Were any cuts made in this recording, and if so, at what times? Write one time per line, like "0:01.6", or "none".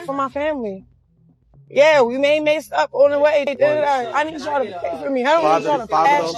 none